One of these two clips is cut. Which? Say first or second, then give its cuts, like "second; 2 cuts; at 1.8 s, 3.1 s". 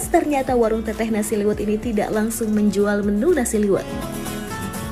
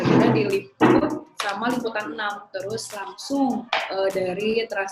second; 2 cuts; at 2.5 s, 3.7 s